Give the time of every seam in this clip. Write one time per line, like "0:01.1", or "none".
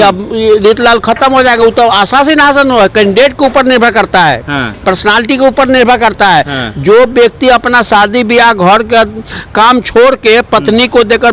none